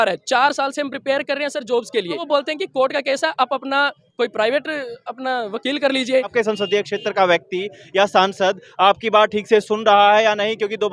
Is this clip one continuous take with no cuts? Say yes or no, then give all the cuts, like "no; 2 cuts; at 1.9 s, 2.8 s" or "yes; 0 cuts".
no; 3 cuts; at 2.2 s, 4.0 s, 6.3 s